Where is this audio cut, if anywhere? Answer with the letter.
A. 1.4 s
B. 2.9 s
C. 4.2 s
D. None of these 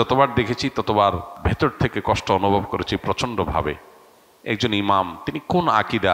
A